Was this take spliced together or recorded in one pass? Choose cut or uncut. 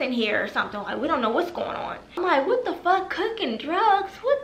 cut